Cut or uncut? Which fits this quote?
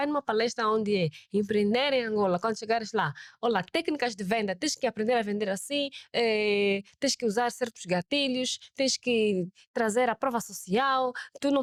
uncut